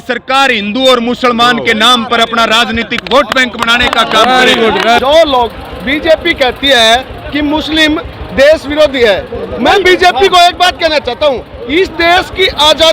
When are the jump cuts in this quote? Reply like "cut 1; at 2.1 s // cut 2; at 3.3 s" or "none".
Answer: cut 1; at 5.0 s